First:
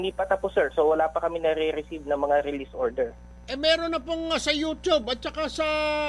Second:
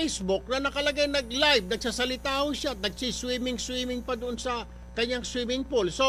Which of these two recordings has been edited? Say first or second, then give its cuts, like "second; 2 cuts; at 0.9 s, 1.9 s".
first; 1 cut; at 5.0 s